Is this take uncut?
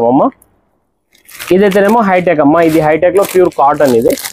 yes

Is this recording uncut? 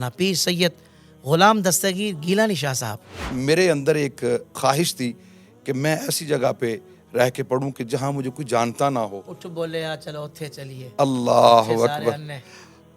no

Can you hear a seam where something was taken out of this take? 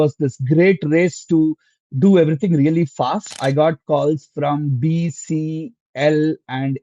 yes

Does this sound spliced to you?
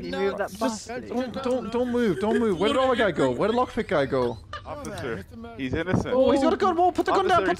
yes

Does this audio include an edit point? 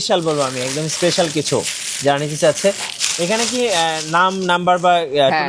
no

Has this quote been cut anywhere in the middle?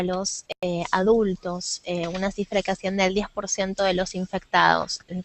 yes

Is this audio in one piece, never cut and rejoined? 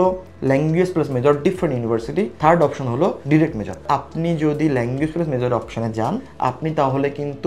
no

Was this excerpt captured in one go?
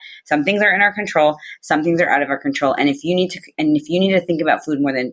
yes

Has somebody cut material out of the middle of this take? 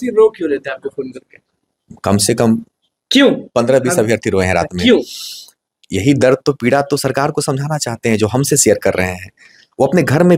no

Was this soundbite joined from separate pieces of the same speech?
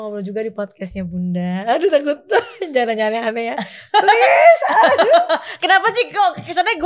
no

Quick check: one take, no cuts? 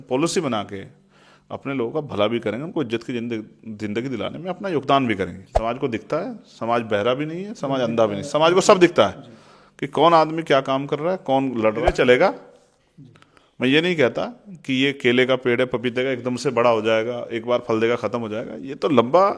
no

